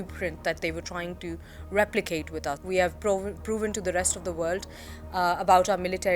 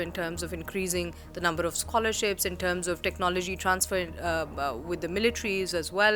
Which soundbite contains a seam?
first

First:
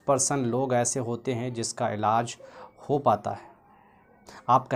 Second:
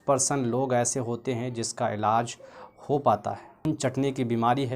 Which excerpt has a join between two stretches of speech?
second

